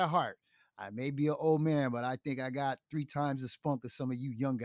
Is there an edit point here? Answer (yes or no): no